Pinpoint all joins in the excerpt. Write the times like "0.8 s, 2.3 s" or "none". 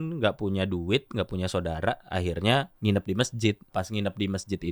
2.7 s, 3.7 s